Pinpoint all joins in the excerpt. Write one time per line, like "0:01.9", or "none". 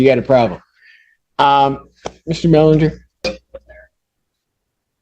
0:03.2